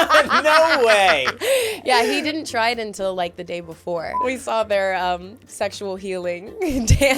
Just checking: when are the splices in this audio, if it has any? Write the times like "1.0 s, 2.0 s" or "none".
4.2 s, 5.5 s